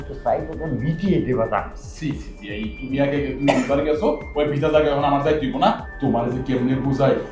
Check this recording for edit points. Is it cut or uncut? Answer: uncut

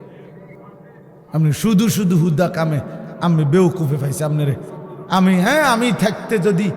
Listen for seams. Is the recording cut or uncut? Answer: cut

